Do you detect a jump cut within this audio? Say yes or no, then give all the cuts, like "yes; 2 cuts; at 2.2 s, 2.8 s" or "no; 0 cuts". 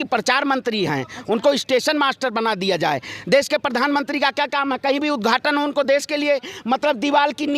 no; 0 cuts